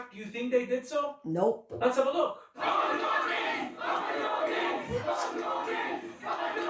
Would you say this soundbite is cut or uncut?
cut